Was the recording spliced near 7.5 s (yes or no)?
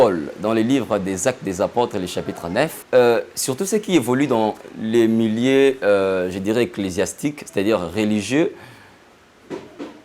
no